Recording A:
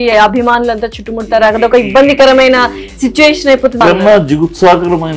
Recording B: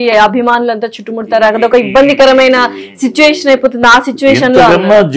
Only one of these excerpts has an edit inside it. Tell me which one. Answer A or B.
A